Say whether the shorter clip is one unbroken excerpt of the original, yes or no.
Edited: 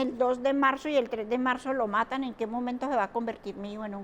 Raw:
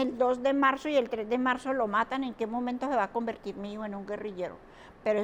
yes